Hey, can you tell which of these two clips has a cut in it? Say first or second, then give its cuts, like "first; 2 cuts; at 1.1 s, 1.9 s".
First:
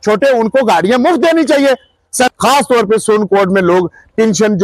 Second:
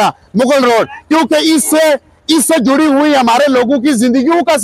first; 1 cut; at 2.3 s